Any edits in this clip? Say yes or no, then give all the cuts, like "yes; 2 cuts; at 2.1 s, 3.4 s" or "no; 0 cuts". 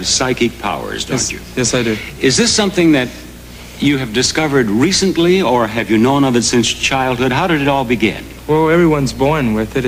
no; 0 cuts